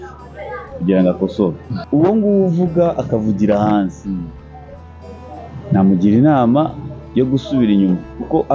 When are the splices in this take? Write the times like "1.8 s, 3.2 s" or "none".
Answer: 1.7 s